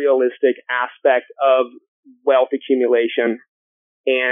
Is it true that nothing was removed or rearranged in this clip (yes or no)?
yes